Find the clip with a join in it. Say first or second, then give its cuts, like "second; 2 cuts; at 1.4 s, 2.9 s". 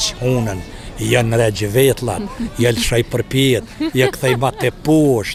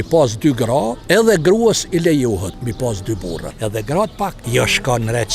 second; 4 cuts; at 1.0 s, 2.6 s, 3.5 s, 4.4 s